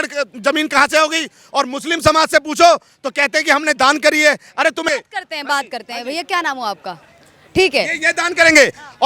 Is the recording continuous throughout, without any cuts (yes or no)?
no